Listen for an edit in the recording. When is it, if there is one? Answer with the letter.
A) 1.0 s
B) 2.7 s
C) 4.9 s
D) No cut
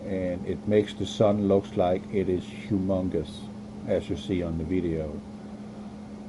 A